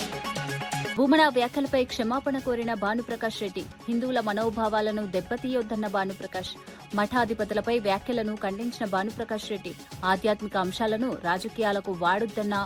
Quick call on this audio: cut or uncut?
cut